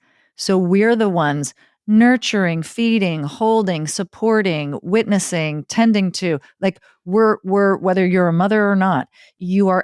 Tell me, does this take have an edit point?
no; 0 cuts

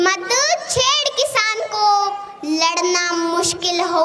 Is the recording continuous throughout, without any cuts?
yes; 0 cuts

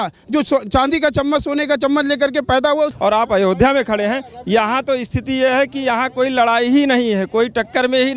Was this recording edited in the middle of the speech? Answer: yes; 1 cut; at 2.9 s

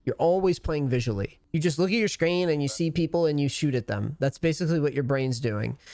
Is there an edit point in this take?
yes; 1 cut; at 1.4 s

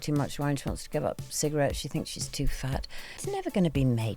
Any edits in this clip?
yes; 1 cut; at 3.1 s

